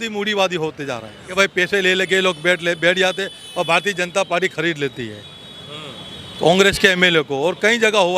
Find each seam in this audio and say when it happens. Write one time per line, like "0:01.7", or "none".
0:01.3